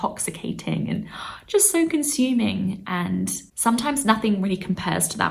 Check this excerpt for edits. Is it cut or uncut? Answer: cut